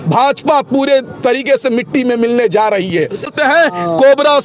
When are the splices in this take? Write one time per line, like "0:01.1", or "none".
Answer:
0:03.3